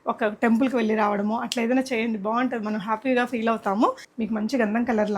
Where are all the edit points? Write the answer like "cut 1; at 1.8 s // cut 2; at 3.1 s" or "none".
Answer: cut 1; at 4.1 s